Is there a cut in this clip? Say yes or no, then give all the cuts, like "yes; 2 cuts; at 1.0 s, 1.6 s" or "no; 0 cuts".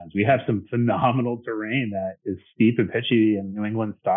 no; 0 cuts